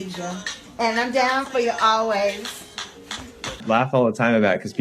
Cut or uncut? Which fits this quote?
cut